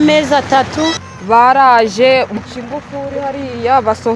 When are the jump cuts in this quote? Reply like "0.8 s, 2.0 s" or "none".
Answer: 1.1 s, 2.4 s